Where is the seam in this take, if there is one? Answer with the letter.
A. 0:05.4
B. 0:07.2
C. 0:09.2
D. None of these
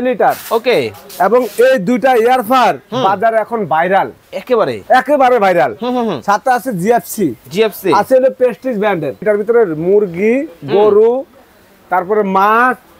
C